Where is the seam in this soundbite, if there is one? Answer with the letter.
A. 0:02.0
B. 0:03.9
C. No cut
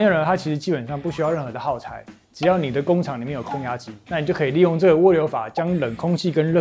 B